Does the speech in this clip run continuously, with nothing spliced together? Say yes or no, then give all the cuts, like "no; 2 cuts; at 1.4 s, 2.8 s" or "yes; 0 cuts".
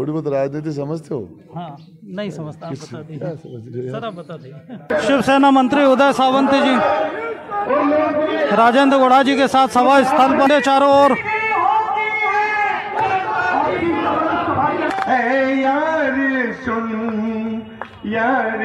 no; 2 cuts; at 4.9 s, 14.9 s